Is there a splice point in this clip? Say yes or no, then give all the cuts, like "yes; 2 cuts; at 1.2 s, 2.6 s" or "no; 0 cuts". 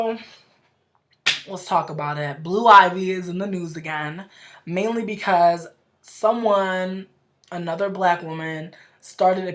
no; 0 cuts